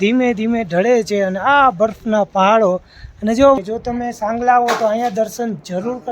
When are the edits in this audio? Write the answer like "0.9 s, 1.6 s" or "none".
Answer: 3.6 s